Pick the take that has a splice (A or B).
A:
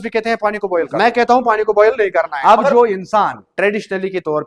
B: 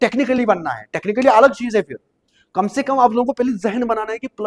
A